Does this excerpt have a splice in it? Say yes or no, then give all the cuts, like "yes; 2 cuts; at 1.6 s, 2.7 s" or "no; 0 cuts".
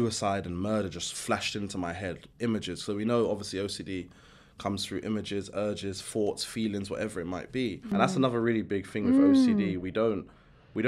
yes; 1 cut; at 7.9 s